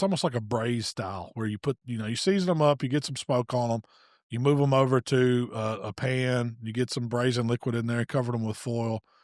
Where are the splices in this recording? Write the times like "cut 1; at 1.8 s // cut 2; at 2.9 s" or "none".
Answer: none